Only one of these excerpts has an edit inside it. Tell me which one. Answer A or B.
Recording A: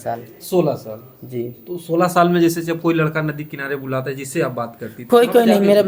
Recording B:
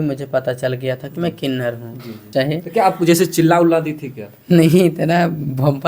B